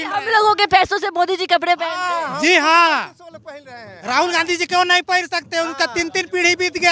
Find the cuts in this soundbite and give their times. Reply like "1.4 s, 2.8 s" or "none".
none